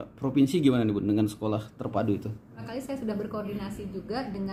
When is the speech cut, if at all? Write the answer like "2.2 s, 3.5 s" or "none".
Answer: 2.7 s

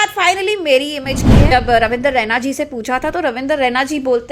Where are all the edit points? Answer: 1.5 s

